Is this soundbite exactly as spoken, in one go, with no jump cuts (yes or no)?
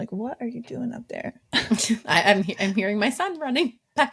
yes